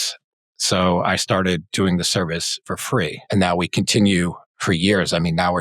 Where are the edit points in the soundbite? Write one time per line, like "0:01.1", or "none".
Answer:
0:03.2
0:04.5